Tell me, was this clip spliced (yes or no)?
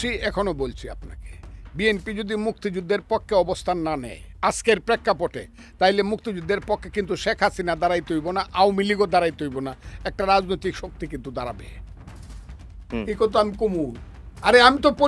no